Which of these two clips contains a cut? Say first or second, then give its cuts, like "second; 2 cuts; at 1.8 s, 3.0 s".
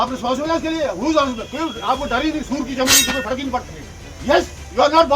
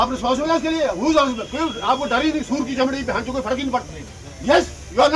first; 1 cut; at 3.0 s